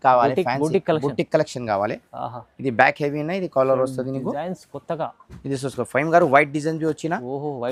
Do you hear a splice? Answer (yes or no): no